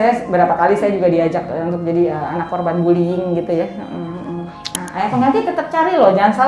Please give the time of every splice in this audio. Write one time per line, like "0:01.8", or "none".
0:04.8